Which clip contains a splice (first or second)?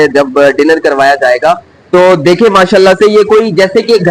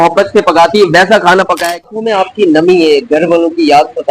second